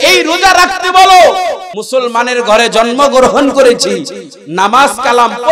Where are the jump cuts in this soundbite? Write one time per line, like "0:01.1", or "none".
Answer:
0:01.7